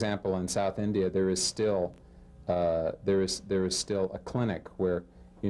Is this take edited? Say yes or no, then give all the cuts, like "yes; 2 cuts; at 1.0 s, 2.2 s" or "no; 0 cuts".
yes; 1 cut; at 2.7 s